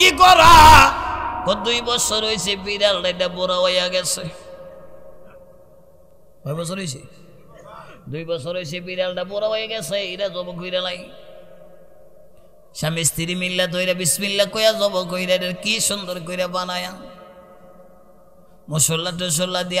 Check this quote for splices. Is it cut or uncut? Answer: uncut